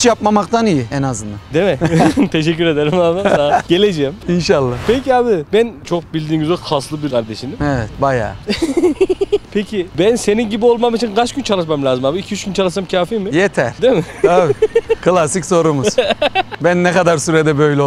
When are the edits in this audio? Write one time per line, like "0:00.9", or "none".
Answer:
none

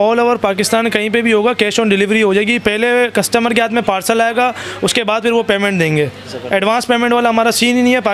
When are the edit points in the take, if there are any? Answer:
none

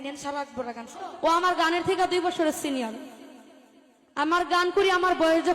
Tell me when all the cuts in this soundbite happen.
0:01.0

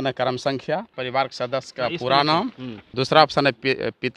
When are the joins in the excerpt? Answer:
0:01.0
0:02.9

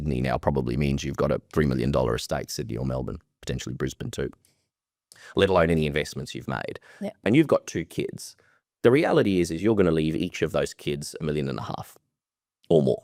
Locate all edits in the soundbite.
none

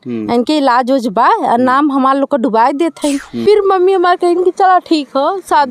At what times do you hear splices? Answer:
0:03.4

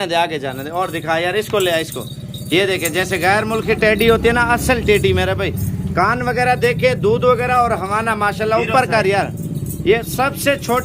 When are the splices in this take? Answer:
none

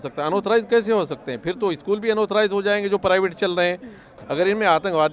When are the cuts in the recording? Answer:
0:04.1

